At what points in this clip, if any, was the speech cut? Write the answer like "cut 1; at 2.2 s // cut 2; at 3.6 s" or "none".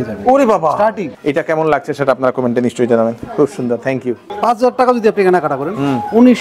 cut 1; at 1.1 s // cut 2; at 4.3 s